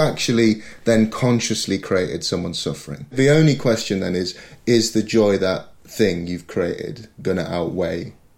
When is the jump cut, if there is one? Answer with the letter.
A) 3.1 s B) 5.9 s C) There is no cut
A